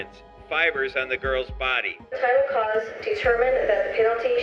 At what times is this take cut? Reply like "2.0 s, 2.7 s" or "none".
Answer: 2.1 s